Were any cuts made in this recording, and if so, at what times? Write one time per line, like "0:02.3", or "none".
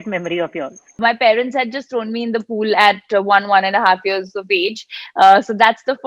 0:00.9